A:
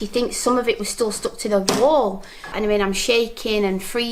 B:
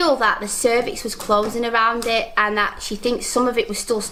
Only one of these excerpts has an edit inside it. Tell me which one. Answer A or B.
A